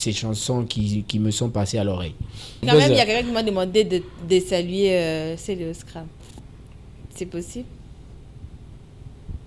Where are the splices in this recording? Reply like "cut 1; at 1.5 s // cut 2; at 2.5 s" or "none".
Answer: cut 1; at 2.7 s